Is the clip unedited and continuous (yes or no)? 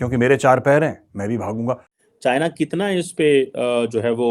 no